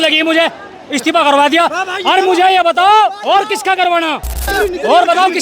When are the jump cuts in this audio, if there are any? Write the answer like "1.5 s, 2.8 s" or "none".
4.5 s